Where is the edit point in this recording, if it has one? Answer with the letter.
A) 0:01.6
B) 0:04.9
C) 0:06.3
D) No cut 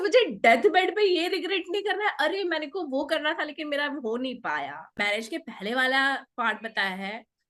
B